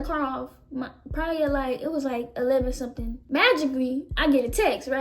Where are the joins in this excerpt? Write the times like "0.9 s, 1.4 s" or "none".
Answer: 3.1 s